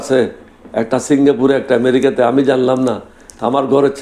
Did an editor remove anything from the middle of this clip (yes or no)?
no